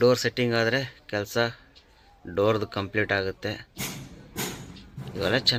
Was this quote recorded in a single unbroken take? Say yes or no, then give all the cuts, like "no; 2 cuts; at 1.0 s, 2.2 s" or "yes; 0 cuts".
yes; 0 cuts